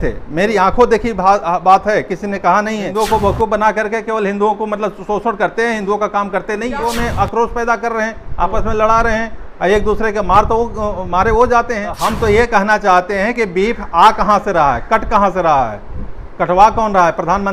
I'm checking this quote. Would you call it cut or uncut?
cut